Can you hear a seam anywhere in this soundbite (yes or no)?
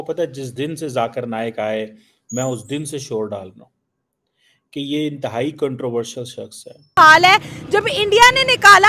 yes